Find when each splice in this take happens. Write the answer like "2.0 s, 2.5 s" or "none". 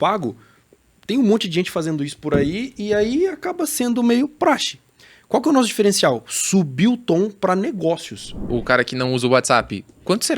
8.5 s